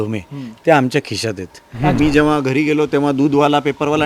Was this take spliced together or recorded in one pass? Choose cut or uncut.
cut